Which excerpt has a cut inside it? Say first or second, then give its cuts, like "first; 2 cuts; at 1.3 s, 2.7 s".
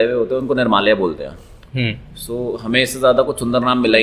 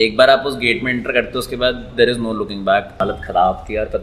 second; 1 cut; at 2.9 s